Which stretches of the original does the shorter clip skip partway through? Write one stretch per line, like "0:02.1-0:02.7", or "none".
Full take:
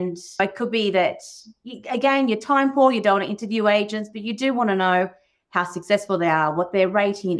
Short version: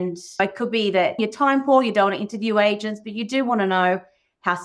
0:01.2-0:02.3